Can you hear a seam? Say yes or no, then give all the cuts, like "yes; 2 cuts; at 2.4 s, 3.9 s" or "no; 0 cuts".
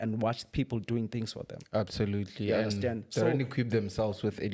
no; 0 cuts